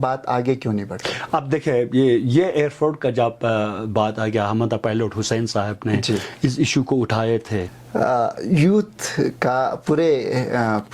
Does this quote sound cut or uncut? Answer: cut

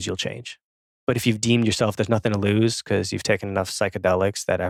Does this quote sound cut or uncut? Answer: uncut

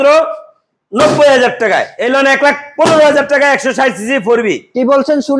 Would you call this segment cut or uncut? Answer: cut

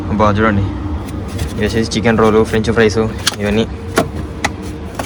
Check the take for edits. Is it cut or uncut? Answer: uncut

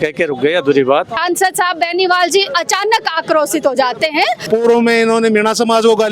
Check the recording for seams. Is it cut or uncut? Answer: cut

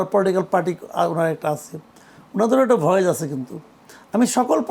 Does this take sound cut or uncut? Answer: uncut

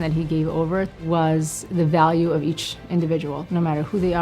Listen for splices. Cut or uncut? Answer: cut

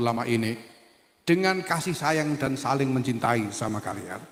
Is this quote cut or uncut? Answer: uncut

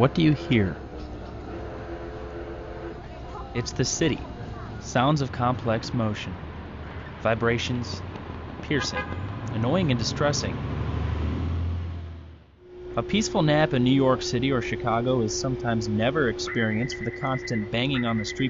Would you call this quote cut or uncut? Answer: cut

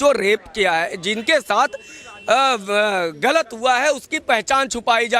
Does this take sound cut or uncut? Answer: uncut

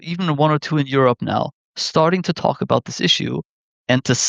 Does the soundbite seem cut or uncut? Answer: uncut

